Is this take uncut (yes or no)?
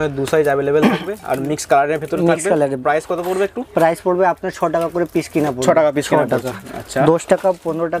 yes